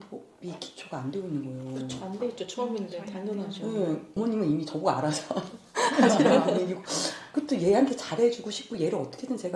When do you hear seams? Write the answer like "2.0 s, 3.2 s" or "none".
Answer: 4.2 s